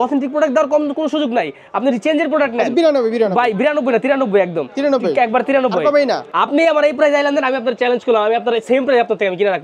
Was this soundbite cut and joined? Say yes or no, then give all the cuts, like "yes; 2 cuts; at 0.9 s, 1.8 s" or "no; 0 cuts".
no; 0 cuts